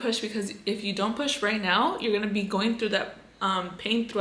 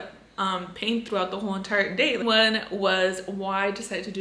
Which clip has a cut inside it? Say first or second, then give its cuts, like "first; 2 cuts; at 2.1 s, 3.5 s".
second; 1 cut; at 2.2 s